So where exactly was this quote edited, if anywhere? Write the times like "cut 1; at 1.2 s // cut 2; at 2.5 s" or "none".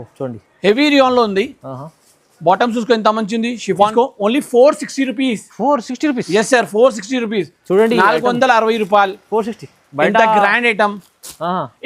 cut 1; at 3.9 s